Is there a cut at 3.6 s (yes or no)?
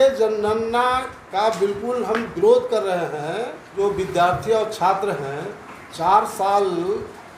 yes